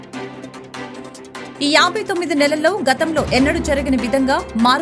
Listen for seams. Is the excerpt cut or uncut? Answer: cut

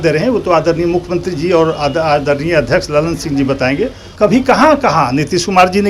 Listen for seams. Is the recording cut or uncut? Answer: cut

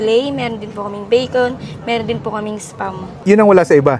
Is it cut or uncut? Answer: uncut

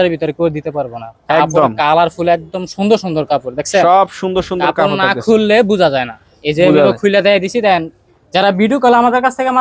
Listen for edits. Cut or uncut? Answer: uncut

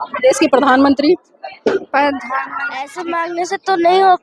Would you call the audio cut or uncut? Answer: cut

